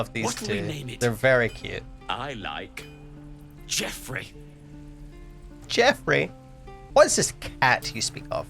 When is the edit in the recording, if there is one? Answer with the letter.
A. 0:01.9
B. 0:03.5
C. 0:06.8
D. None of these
C